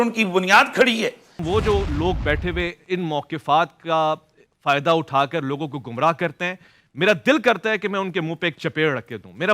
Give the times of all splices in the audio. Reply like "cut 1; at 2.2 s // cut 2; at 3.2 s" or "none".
cut 1; at 1.3 s